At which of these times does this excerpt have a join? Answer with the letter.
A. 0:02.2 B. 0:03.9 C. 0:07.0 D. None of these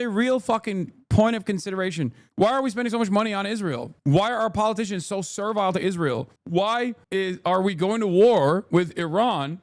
A